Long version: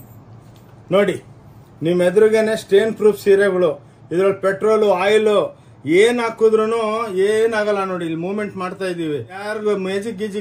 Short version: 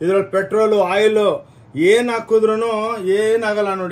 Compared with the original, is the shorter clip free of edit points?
yes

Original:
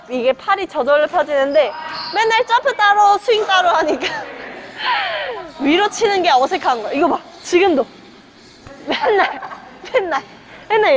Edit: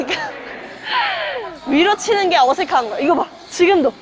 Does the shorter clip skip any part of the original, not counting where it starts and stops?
no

